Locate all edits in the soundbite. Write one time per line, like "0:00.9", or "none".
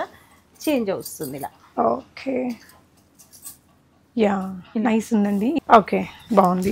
0:05.6